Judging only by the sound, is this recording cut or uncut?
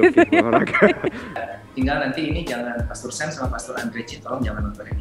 cut